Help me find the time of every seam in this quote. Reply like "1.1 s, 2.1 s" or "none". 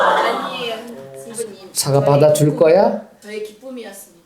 3.2 s